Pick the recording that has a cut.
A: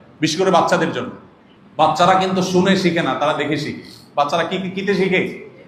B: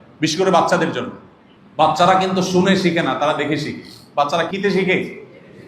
B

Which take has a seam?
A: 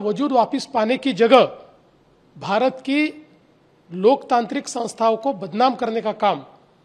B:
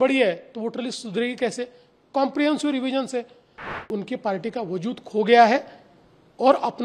B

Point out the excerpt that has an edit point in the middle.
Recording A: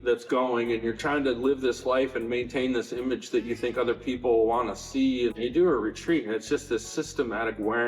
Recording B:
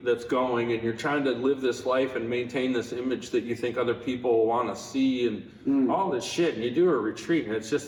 A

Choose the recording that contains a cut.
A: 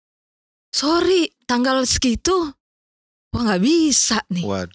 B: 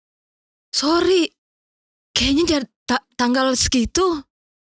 A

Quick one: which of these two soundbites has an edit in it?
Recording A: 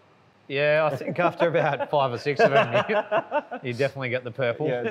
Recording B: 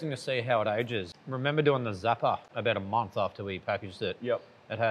B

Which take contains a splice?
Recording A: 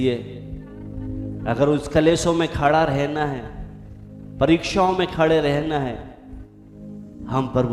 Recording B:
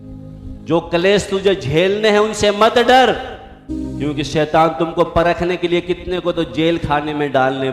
B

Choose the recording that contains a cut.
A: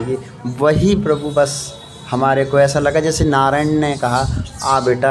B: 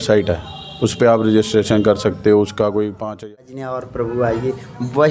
B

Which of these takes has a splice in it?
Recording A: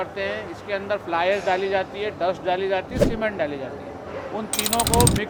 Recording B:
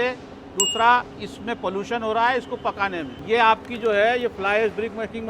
B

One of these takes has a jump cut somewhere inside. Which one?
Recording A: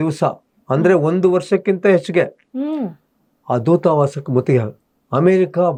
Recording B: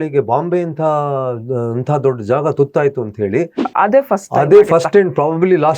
B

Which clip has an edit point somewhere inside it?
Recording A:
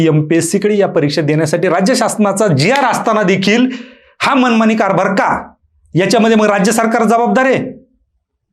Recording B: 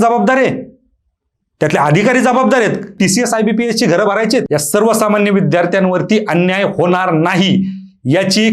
B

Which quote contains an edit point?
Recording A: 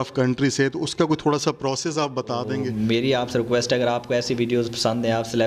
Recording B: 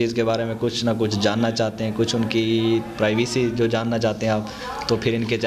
A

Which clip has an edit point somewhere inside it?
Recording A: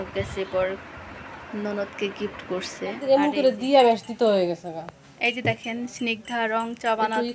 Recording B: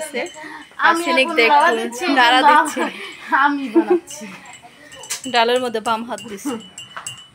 A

